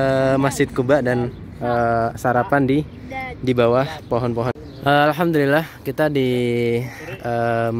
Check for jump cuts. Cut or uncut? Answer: cut